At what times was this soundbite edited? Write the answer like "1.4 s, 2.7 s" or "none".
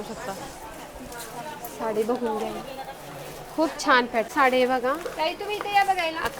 4.3 s

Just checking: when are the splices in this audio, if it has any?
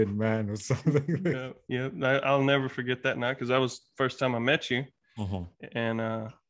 1.5 s

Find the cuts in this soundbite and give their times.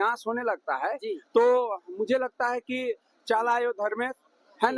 none

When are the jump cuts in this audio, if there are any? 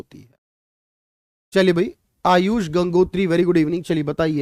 none

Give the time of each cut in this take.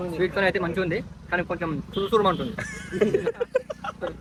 none

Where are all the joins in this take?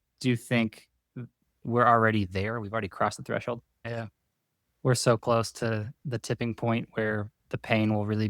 3.8 s

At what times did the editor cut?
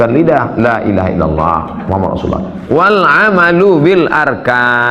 none

